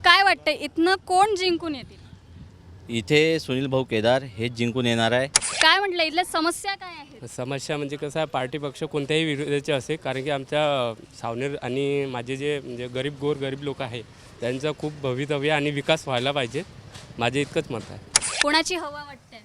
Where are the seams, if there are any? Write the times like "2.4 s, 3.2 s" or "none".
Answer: 5.4 s, 18.2 s

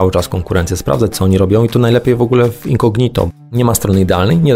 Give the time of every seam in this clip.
3.3 s

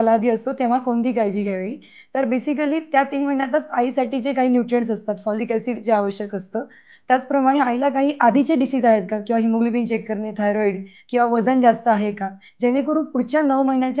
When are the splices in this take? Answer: none

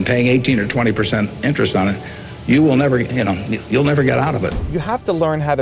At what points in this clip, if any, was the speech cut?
4.6 s

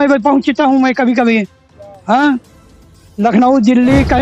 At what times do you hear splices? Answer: none

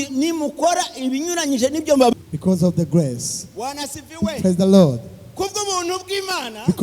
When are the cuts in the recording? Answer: 2.1 s

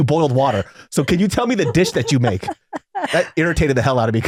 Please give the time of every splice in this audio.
none

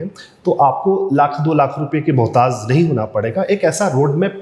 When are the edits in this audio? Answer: none

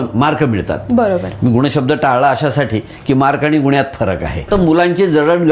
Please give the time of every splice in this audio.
4.5 s

